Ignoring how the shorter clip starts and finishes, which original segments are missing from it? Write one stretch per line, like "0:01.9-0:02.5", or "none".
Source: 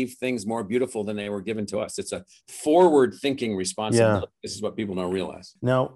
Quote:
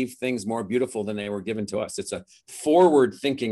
none